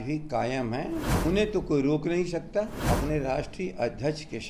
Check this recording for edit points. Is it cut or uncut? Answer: cut